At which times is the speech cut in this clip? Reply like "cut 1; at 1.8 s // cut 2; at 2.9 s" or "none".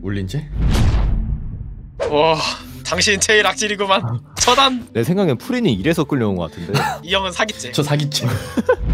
cut 1; at 4.8 s // cut 2; at 7.0 s